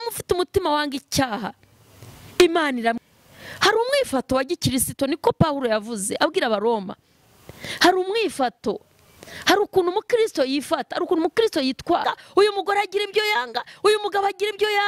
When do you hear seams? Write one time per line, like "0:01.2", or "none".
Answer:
0:03.0
0:12.0